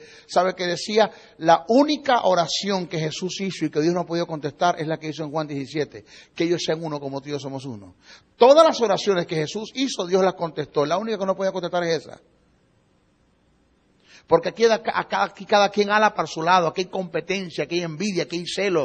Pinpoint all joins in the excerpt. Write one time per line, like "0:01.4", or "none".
0:15.8

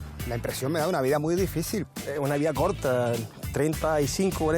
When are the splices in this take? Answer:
0:01.9

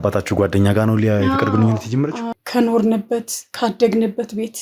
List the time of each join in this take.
0:02.3

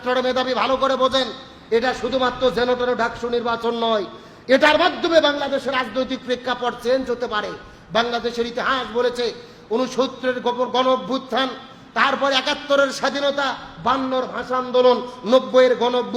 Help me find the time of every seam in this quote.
none

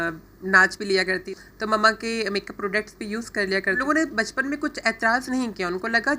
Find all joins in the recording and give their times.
0:01.4
0:03.8

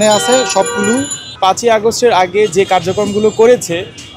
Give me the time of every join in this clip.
0:01.2

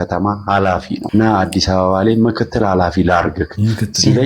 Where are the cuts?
0:01.0

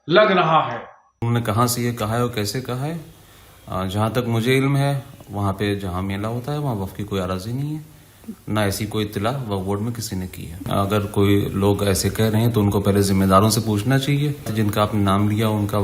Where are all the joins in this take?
0:01.0
0:10.6
0:14.5

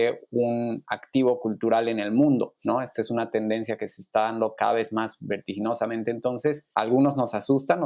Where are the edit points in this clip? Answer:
0:02.6
0:06.6

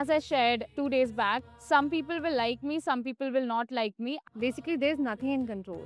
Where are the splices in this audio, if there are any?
0:04.2

